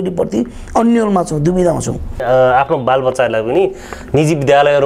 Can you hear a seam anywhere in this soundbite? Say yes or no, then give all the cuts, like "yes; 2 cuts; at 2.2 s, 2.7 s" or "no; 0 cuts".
yes; 1 cut; at 2.2 s